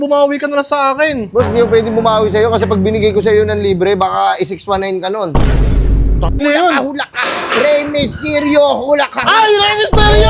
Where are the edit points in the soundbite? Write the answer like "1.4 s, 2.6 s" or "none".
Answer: 6.4 s